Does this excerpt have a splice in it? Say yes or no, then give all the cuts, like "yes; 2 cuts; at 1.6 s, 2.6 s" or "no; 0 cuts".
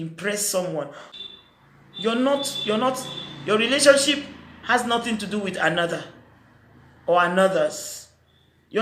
yes; 1 cut; at 1.0 s